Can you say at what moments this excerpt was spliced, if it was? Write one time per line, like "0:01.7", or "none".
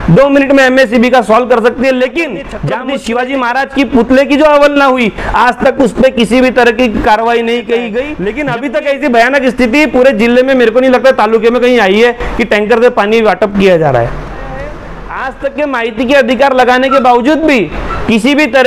0:02.5
0:08.1
0:14.9